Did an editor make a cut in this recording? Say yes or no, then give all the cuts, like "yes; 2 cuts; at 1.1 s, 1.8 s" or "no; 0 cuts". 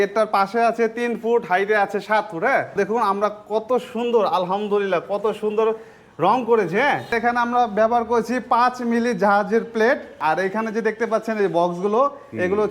yes; 3 cuts; at 2.7 s, 7.1 s, 10.2 s